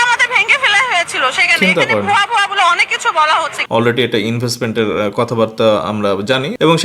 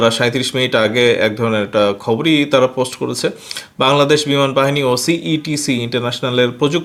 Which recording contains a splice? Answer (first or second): first